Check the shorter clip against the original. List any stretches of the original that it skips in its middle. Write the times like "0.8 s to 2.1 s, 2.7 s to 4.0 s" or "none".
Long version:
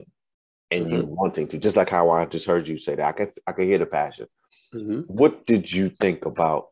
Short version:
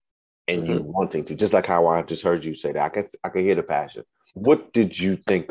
4.6 s to 5.1 s